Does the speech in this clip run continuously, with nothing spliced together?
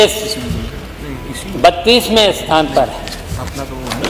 yes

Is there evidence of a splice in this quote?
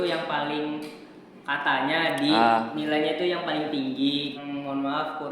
yes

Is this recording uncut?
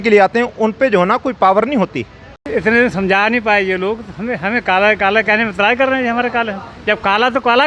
no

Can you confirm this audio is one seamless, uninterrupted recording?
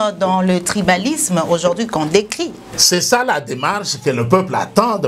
no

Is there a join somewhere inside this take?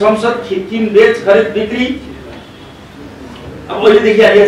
no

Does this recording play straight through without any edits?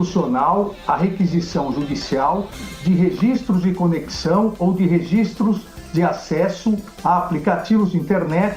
yes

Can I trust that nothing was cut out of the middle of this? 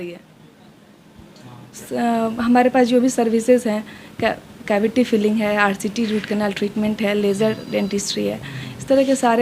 no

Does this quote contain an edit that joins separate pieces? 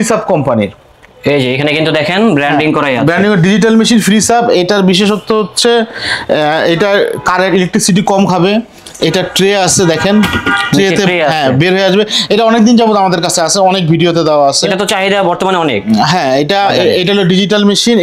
no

